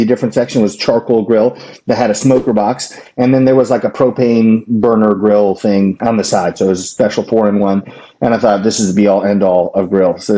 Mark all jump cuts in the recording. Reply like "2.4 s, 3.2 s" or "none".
none